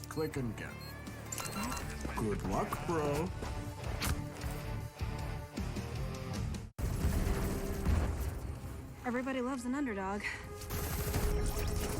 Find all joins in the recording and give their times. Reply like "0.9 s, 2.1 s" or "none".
6.7 s